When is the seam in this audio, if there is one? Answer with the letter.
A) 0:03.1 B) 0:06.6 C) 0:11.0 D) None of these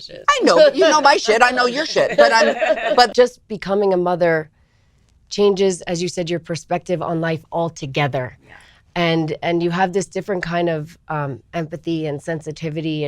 A